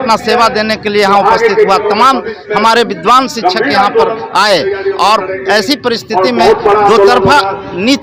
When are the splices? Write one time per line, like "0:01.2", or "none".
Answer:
none